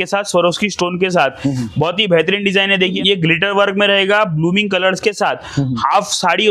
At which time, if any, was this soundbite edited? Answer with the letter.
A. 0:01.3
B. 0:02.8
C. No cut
B